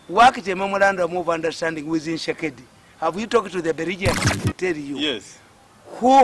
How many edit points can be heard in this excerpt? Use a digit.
1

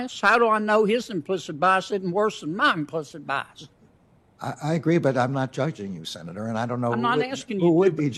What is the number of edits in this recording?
0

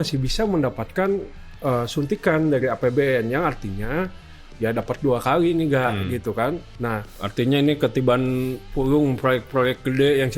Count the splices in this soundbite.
1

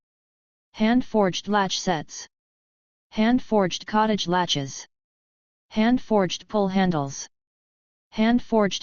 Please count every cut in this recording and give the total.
0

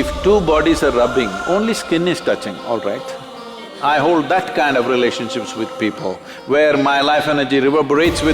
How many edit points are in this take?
1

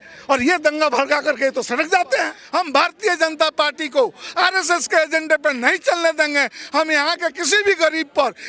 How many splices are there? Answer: 1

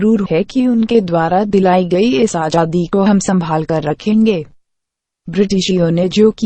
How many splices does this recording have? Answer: 1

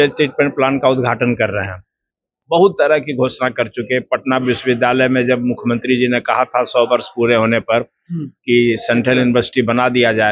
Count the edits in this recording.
1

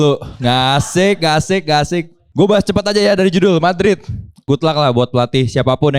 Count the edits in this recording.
2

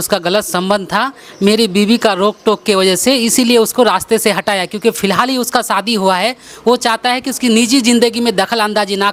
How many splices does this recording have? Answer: 0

